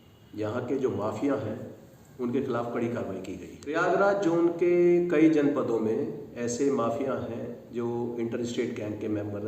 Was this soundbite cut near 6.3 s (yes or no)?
no